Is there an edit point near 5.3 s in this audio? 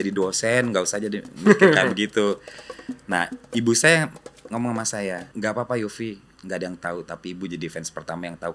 yes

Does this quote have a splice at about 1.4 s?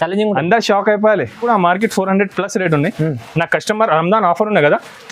yes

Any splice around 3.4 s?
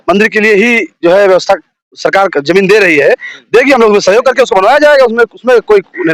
no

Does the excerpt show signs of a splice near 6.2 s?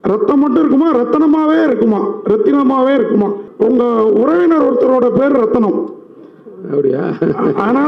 no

